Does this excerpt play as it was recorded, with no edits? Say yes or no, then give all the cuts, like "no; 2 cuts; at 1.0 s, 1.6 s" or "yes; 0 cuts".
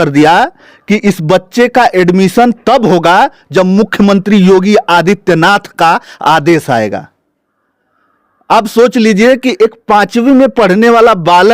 yes; 0 cuts